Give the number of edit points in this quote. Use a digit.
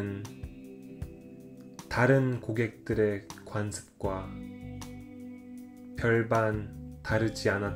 2